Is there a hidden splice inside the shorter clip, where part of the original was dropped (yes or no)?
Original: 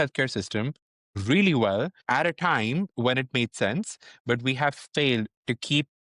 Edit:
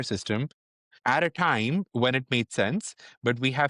yes